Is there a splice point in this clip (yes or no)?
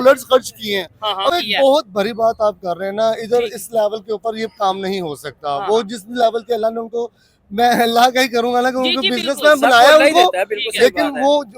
yes